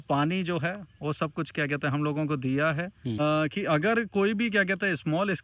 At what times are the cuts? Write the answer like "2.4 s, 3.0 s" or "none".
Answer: 3.2 s